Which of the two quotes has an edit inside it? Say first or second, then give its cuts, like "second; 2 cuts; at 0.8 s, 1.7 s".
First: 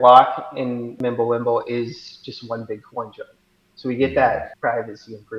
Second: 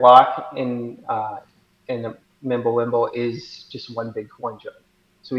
first; 2 cuts; at 0.9 s, 4.5 s